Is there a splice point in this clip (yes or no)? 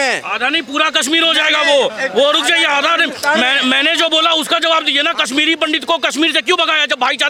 no